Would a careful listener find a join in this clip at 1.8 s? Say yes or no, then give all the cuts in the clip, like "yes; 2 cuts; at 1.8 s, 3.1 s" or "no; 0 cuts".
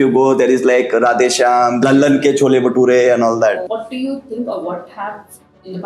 yes; 2 cuts; at 1.8 s, 3.7 s